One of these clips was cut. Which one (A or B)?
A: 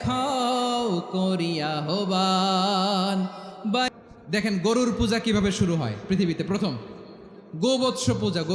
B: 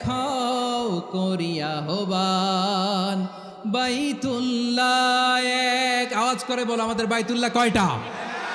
A